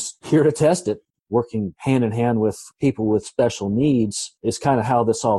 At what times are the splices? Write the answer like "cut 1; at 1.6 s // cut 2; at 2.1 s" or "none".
cut 1; at 1.1 s